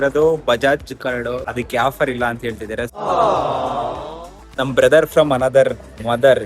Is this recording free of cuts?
no; 2 cuts; at 1.4 s, 4.4 s

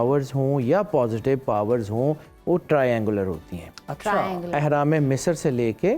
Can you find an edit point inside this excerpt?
no; 0 cuts

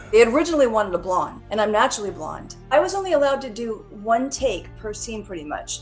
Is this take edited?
yes; 2 cuts; at 1.4 s, 2.5 s

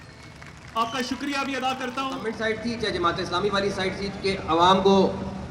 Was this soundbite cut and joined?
yes; 1 cut; at 2.2 s

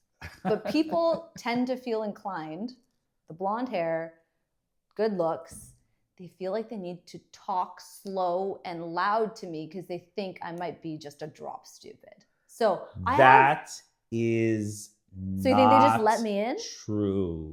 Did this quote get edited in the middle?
no; 0 cuts

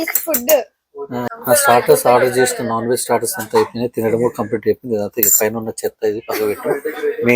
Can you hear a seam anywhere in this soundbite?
yes; 1 cut; at 1.3 s

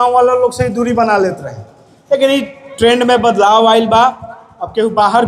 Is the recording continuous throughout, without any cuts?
yes; 0 cuts

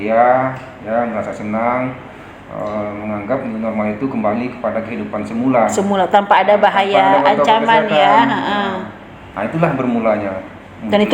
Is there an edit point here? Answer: no; 0 cuts

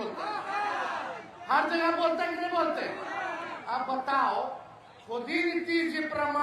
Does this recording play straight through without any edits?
yes; 0 cuts

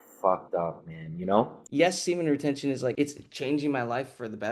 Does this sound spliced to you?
yes; 2 cuts; at 1.6 s, 2.9 s

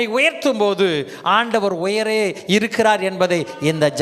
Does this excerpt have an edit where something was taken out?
no; 0 cuts

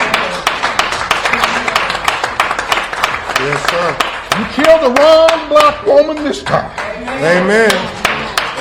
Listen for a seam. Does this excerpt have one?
no; 0 cuts

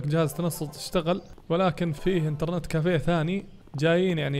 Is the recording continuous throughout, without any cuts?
no; 1 cut; at 1.9 s

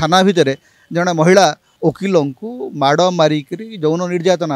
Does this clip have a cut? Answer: yes; 1 cut; at 1.7 s

